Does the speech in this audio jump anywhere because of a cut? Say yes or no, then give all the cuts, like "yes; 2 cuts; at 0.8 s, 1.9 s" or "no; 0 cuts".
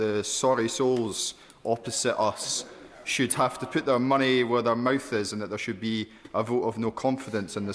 no; 0 cuts